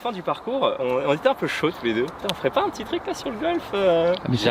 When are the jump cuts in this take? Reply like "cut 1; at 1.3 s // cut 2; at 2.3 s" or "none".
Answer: cut 1; at 2.2 s